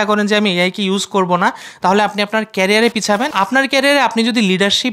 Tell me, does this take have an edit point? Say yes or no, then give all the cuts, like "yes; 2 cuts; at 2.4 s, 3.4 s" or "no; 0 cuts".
yes; 1 cut; at 3.3 s